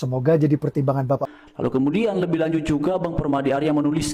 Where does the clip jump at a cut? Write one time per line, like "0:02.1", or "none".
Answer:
0:01.4